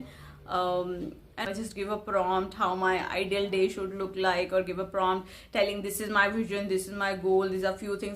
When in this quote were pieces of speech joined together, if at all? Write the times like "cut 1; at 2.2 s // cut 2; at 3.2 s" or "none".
cut 1; at 1.4 s